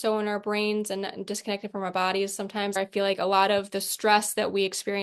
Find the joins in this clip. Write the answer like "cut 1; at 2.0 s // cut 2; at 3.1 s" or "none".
cut 1; at 2.8 s